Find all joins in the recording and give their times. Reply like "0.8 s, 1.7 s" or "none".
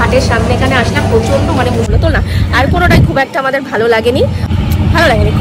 1.9 s, 4.5 s